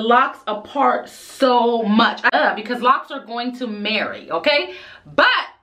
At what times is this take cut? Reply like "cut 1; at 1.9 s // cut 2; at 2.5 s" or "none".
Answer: cut 1; at 2.3 s

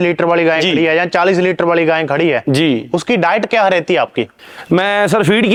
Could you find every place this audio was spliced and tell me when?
none

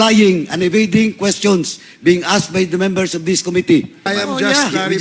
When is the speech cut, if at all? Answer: cut 1; at 4.0 s

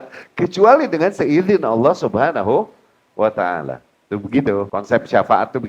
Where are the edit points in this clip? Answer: cut 1; at 4.7 s

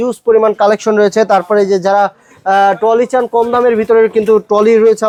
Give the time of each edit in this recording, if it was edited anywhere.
none

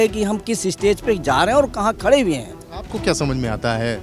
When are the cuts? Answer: none

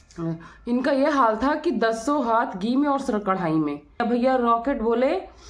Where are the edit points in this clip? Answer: cut 1; at 4.0 s

